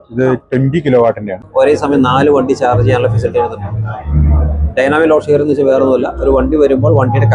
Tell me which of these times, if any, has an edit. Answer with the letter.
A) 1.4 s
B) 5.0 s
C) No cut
A